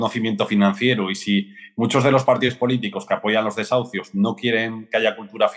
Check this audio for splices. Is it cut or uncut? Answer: uncut